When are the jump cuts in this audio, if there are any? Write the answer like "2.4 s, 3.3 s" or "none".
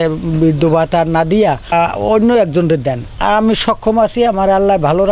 1.7 s, 3.1 s